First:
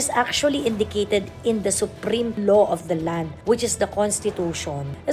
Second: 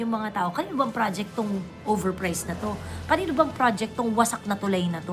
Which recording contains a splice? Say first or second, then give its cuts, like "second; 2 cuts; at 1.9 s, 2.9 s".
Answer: first; 2 cuts; at 2.4 s, 3.3 s